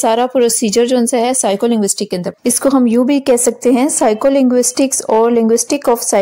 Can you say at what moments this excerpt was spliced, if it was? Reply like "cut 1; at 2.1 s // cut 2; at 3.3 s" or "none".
cut 1; at 2.3 s